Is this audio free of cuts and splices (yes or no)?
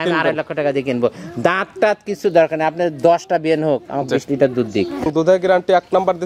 no